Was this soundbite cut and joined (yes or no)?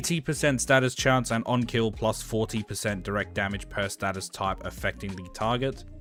no